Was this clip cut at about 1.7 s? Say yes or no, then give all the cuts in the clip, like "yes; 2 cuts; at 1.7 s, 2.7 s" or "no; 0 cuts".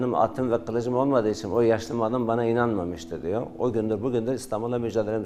no; 0 cuts